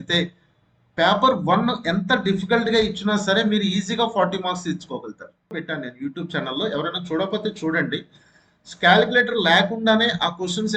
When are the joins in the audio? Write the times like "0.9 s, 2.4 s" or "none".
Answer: 5.6 s